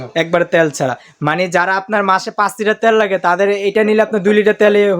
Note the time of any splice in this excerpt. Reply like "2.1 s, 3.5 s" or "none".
none